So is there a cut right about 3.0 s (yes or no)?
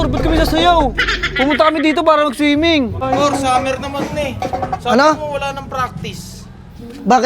yes